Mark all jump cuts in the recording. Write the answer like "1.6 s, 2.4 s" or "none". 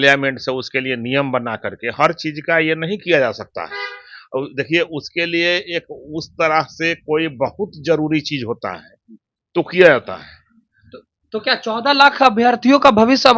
none